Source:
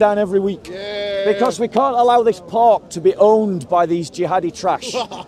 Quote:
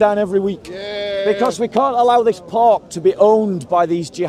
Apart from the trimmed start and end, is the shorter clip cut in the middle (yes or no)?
no